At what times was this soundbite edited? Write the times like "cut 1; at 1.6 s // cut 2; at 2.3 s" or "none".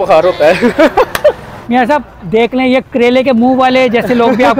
cut 1; at 1.5 s // cut 2; at 2.9 s